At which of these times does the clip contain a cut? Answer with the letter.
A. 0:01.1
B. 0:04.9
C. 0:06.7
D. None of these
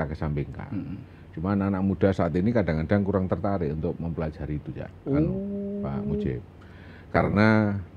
D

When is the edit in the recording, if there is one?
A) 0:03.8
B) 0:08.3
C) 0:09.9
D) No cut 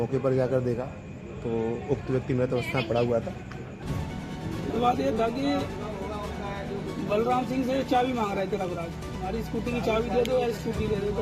A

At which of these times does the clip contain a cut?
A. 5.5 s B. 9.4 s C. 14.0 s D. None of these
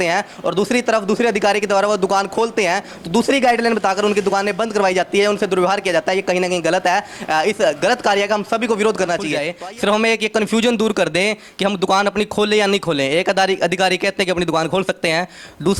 B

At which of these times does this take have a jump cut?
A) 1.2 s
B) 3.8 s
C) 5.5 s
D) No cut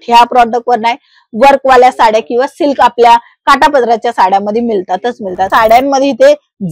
C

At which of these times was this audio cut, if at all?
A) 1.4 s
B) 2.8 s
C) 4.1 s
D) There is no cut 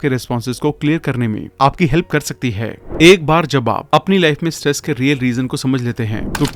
B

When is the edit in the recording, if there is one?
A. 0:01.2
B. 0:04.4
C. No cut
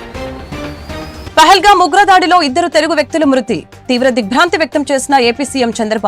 A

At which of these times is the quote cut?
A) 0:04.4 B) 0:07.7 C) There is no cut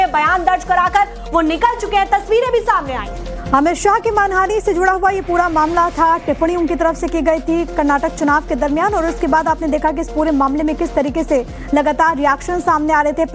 B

